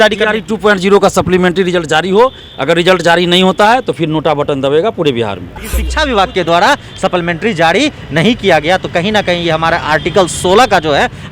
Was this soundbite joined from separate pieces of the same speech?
yes; 1 cut; at 5.8 s

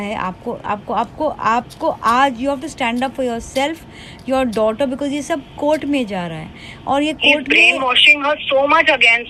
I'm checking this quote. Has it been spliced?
no; 0 cuts

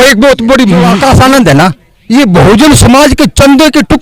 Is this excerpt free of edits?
no; 1 cut; at 0.9 s

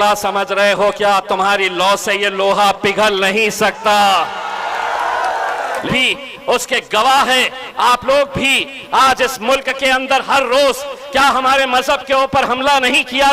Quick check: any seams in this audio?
yes; 1 cut; at 5.8 s

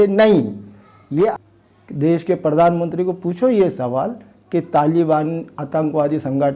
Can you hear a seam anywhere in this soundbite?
yes; 1 cut; at 1.3 s

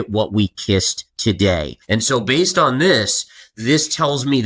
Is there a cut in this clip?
yes; 2 cuts; at 1.0 s, 1.8 s

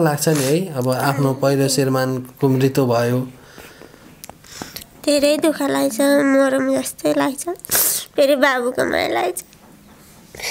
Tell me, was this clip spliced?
no; 0 cuts

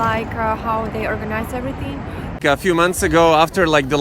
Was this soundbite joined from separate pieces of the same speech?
yes; 1 cut; at 2.4 s

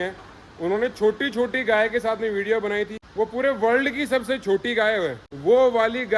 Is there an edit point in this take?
yes; 2 cuts; at 3.0 s, 5.3 s

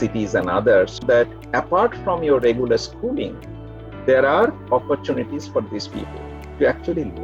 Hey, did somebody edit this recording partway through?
no; 0 cuts

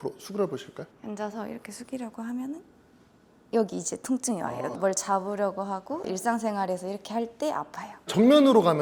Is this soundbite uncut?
yes; 0 cuts

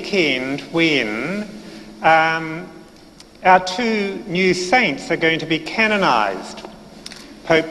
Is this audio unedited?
no; 1 cut; at 5.7 s

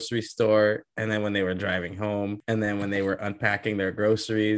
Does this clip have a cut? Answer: yes; 1 cut; at 2.4 s

